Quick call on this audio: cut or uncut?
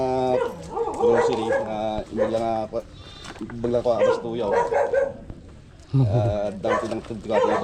uncut